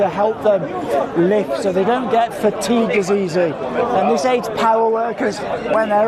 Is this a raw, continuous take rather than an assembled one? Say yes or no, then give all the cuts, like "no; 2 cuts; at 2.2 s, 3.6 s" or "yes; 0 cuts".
yes; 0 cuts